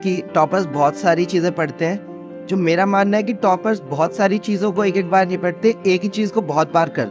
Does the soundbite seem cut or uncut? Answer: uncut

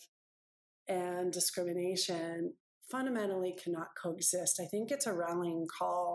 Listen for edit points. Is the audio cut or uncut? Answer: uncut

